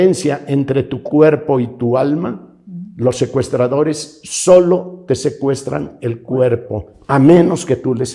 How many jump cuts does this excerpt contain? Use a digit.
0